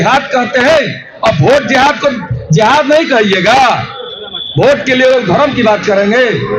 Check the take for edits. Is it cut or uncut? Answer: uncut